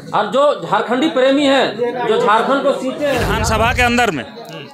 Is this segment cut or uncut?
cut